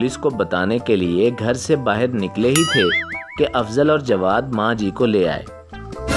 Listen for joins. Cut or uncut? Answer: uncut